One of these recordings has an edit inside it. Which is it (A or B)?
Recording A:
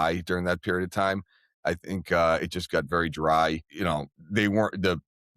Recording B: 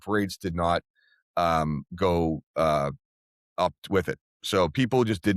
A